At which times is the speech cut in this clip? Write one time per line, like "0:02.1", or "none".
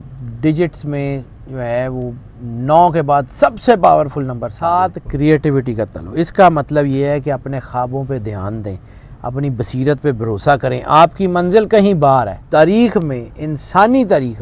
0:04.5
0:12.4